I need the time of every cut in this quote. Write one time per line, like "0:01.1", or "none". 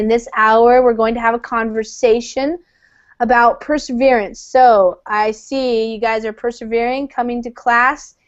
none